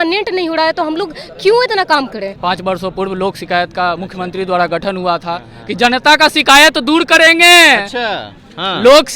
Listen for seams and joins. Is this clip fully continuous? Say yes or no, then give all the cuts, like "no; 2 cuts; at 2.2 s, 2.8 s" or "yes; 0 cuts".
no; 1 cut; at 2.3 s